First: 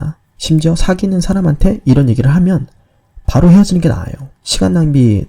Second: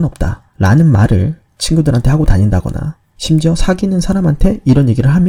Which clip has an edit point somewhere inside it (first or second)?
first